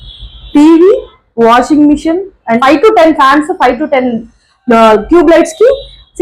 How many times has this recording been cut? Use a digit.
1